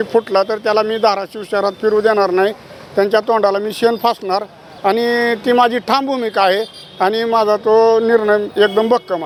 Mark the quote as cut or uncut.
uncut